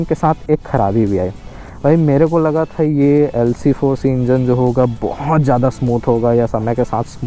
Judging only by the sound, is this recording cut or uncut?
uncut